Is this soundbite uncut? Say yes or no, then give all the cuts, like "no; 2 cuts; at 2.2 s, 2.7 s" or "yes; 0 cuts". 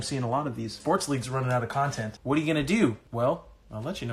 no; 3 cuts; at 0.8 s, 2.1 s, 3.0 s